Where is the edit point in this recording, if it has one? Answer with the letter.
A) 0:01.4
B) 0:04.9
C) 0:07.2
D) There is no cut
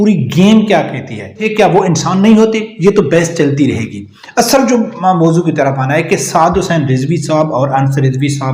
A